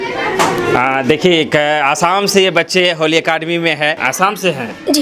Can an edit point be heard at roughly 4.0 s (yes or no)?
yes